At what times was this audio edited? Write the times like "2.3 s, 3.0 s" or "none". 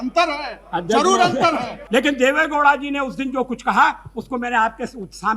1.8 s

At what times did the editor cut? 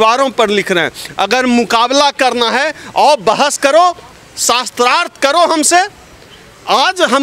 none

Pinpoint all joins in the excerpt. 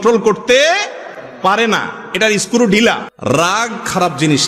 3.1 s

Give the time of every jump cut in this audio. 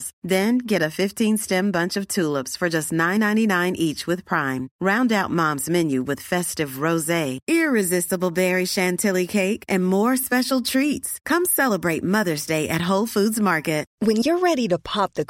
13.9 s

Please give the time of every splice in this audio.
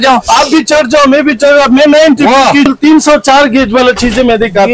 2.7 s

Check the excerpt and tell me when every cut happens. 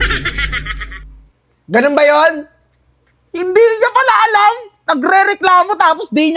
none

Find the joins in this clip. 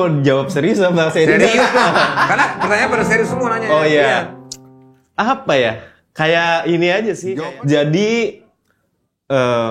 7.2 s

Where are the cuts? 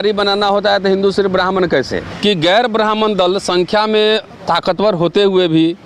2.1 s

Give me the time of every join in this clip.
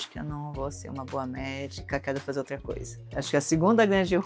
2.9 s

